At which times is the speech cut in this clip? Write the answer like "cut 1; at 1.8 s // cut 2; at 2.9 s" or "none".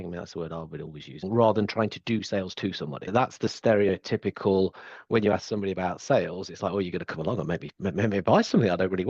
cut 1; at 1.2 s // cut 2; at 3.1 s